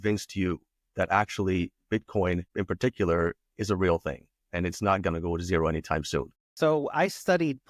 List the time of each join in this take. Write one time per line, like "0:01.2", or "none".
0:06.5